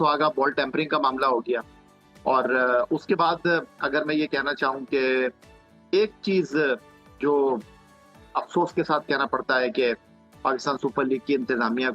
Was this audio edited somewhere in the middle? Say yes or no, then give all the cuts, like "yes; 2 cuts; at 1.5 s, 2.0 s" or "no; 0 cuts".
no; 0 cuts